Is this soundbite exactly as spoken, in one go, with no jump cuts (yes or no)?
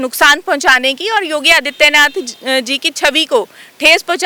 yes